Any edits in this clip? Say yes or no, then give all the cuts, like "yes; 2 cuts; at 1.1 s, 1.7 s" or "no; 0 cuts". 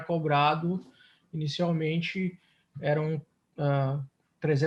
no; 0 cuts